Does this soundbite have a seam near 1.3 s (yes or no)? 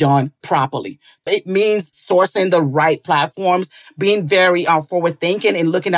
yes